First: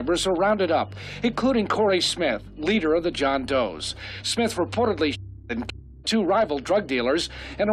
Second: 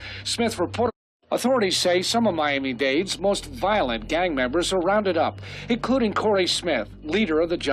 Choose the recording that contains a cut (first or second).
second